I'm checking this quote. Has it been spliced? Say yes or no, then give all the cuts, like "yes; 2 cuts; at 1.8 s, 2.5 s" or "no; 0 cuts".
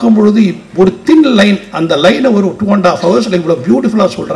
no; 0 cuts